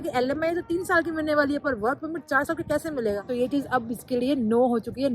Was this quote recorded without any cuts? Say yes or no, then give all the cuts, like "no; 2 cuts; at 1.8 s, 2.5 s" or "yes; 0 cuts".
no; 1 cut; at 3.2 s